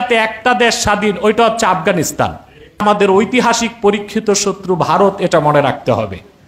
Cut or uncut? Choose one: cut